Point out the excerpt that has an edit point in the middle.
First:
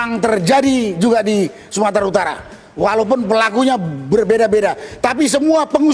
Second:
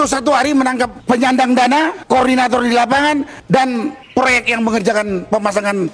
second; 4 cuts; at 1.0 s, 2.0 s, 3.4 s, 4.0 s

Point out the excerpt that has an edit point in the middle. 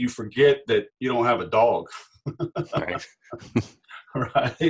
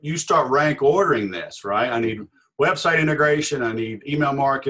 first; 1 cut; at 0.9 s

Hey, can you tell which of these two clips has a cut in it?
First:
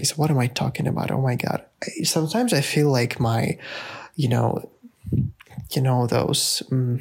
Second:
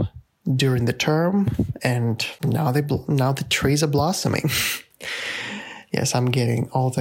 second; 1 cut; at 2.3 s

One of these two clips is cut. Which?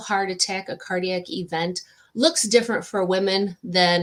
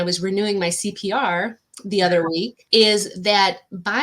second; 1 cut; at 2.6 s

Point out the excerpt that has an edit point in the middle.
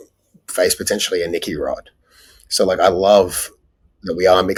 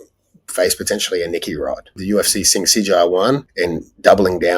second; 2 cuts; at 1.9 s, 3.5 s

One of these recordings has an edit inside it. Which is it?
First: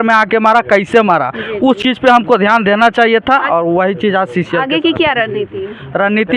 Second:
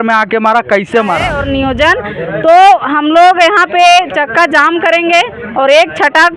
second; 1 cut; at 1.3 s

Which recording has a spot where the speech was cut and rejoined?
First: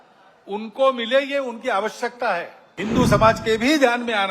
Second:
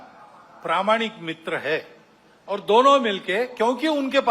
first; 1 cut; at 2.6 s

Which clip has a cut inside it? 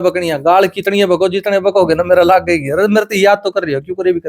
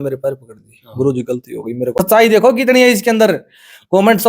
second; 1 cut; at 1.9 s

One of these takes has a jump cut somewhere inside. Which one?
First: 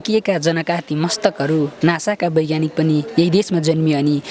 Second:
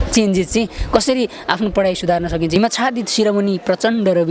second; 1 cut; at 2.6 s

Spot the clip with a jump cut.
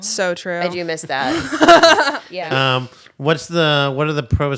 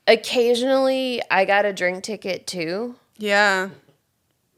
first; 1 cut; at 2.3 s

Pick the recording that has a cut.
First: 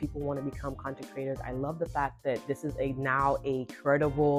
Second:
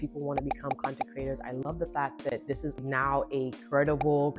second; 1 cut; at 2.8 s

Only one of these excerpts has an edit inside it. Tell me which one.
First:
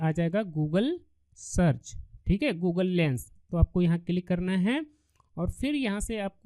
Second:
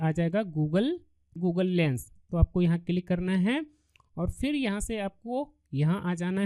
second; 1 cut; at 1.4 s

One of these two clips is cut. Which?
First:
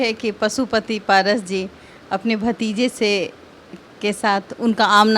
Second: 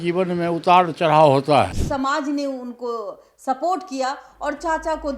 second; 1 cut; at 1.8 s

